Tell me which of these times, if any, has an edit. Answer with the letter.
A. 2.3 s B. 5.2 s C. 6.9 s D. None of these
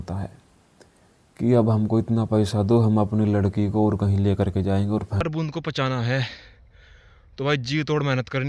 B